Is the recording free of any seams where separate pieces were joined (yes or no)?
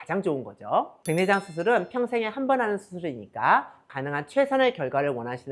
no